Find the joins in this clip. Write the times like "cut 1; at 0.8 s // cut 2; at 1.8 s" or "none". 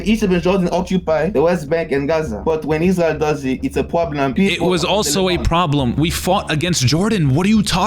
cut 1; at 1.3 s // cut 2; at 2.3 s // cut 3; at 4.3 s // cut 4; at 5.9 s